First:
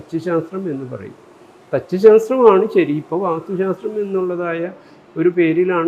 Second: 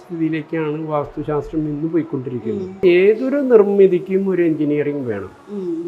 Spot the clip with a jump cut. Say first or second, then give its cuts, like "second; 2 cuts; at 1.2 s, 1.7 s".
second; 1 cut; at 2.8 s